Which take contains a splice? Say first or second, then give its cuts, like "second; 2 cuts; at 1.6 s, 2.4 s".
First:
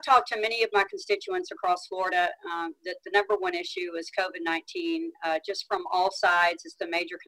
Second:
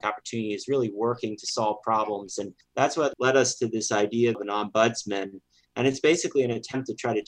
second; 1 cut; at 2.6 s